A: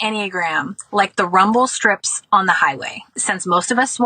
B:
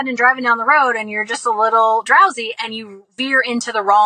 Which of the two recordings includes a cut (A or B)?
A